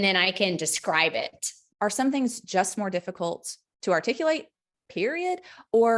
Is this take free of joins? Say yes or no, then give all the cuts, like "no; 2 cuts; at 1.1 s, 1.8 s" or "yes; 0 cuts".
no; 1 cut; at 1.6 s